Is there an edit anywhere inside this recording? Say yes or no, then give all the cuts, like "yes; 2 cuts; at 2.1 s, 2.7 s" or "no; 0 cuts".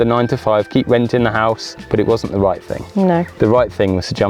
yes; 1 cut; at 1.7 s